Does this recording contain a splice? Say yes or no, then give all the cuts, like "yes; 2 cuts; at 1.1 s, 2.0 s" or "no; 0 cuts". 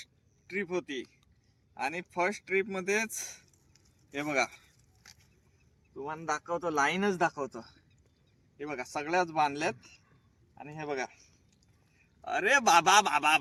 no; 0 cuts